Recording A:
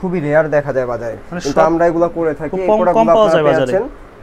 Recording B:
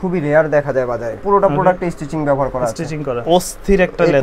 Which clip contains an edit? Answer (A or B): B